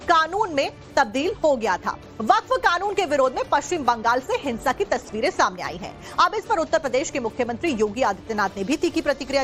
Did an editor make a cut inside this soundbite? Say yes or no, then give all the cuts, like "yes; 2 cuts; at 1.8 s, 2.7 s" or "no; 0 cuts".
no; 0 cuts